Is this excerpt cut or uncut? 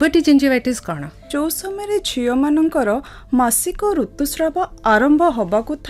cut